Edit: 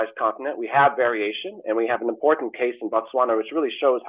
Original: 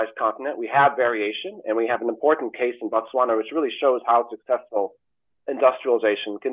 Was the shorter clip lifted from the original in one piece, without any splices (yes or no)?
yes